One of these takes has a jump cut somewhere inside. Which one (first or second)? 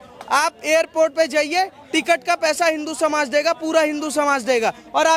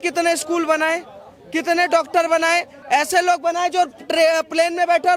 second